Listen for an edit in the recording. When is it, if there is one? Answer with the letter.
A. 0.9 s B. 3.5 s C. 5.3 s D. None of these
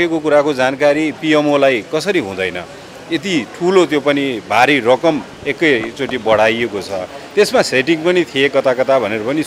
D